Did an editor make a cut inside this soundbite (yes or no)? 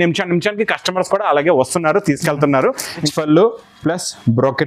yes